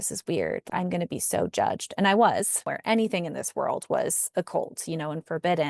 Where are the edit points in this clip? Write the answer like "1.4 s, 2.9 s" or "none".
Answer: 2.6 s